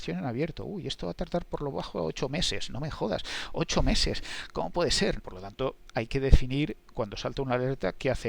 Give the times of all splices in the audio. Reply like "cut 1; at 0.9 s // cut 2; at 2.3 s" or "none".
cut 1; at 5.2 s